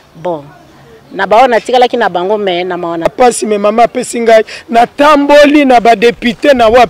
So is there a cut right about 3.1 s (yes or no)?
yes